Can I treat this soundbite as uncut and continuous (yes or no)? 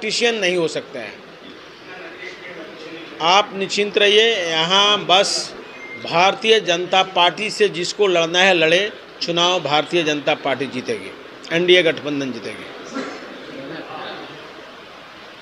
yes